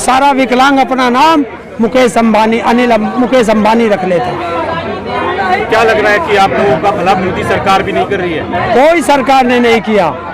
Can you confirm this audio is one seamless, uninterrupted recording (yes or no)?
yes